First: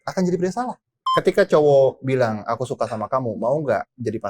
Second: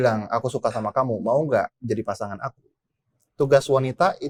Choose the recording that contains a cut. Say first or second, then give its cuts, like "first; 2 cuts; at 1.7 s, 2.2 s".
first; 1 cut; at 1.0 s